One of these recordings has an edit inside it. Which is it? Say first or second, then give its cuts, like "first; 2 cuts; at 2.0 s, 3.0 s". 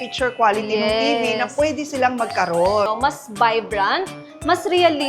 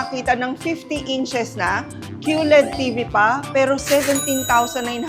first; 1 cut; at 2.8 s